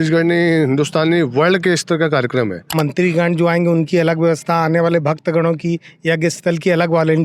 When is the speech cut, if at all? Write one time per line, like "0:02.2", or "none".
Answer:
0:02.6